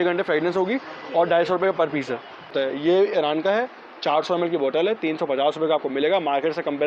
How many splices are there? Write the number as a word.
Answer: one